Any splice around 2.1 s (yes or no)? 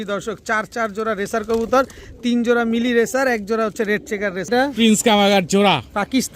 no